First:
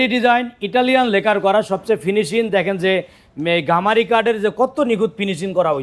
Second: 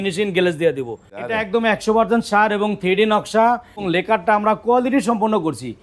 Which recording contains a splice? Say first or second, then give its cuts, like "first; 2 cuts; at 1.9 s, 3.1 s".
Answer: second; 2 cuts; at 1.3 s, 3.8 s